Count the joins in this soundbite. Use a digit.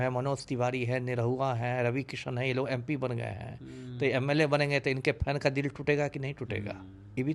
0